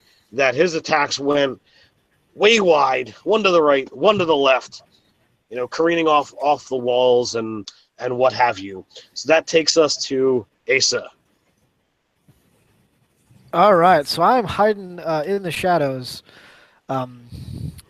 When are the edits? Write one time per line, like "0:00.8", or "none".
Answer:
none